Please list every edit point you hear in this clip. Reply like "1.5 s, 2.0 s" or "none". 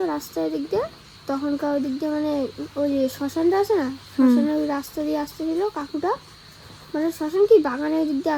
none